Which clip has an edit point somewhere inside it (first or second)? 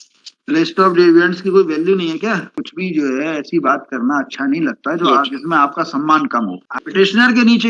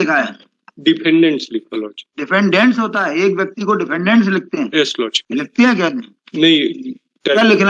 first